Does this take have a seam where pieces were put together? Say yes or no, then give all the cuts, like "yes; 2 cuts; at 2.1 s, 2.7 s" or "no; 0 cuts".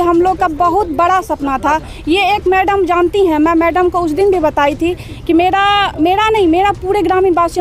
no; 0 cuts